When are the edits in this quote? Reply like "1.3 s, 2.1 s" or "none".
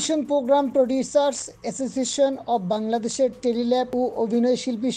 3.9 s